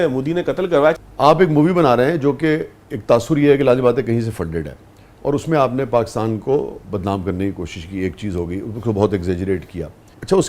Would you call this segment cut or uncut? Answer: cut